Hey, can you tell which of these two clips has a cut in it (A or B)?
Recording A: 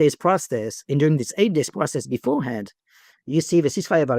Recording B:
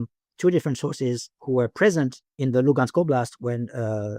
B